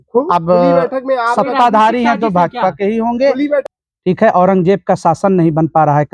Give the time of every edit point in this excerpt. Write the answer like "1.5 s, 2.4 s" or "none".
3.6 s

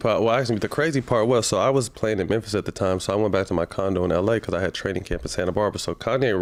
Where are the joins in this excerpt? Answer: none

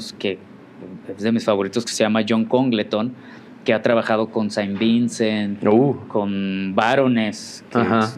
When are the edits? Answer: none

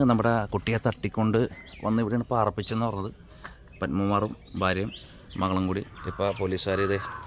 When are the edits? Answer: none

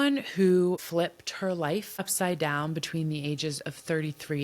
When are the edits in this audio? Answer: 2.0 s

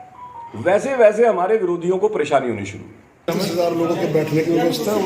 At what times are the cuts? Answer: 3.3 s

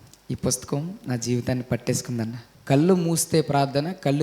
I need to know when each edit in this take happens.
2.5 s

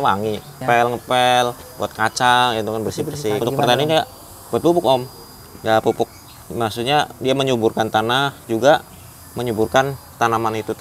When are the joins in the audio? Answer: none

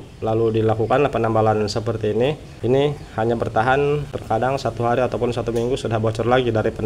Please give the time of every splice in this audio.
2.5 s, 4.1 s

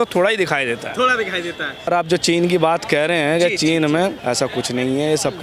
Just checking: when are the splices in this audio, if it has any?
1.9 s, 4.2 s

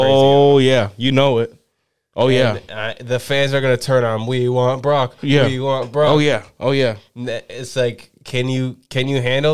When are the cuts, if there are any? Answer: none

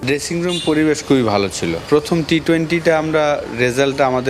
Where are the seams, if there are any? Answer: none

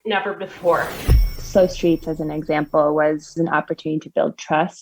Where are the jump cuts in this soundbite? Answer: 1.3 s

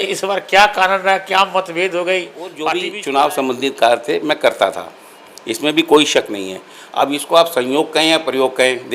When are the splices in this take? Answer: 2.8 s

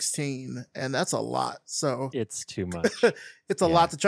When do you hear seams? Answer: none

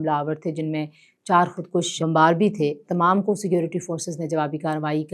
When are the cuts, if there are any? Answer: 2.0 s, 2.8 s

